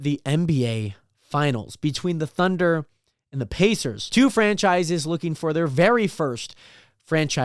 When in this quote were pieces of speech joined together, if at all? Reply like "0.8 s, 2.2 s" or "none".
4.0 s